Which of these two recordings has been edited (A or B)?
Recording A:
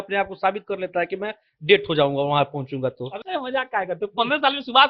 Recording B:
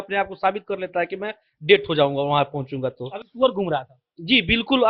A